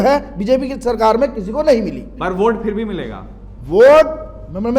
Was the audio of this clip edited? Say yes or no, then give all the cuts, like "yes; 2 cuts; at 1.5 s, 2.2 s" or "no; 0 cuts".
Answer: yes; 1 cut; at 2.2 s